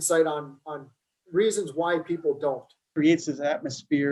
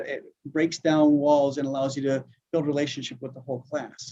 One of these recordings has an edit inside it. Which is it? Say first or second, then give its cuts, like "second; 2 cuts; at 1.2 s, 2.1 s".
first; 1 cut; at 2.7 s